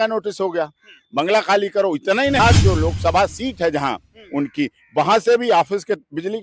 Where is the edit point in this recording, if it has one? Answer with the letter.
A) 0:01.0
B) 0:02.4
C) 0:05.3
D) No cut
B